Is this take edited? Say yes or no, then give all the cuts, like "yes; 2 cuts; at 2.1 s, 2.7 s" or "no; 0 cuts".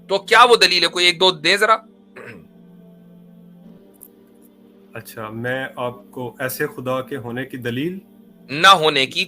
no; 0 cuts